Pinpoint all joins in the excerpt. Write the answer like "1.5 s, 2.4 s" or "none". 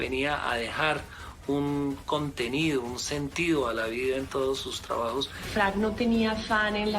5.5 s